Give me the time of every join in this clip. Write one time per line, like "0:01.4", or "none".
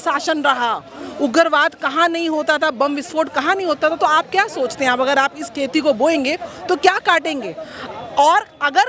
none